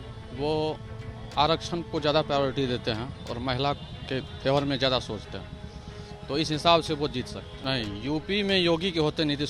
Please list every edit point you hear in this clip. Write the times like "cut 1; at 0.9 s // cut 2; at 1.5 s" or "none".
cut 1; at 7.4 s